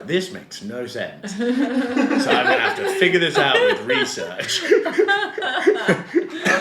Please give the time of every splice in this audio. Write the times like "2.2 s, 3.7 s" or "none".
none